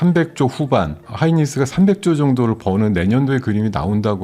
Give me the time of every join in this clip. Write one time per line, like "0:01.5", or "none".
0:01.0